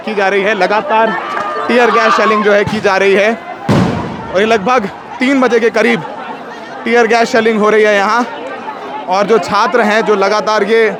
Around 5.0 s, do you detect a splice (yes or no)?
no